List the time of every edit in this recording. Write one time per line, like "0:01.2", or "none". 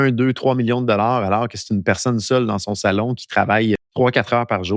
0:03.9